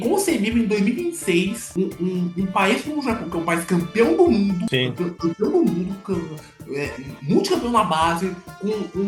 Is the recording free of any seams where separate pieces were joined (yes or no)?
yes